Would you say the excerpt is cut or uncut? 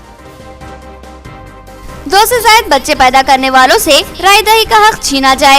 cut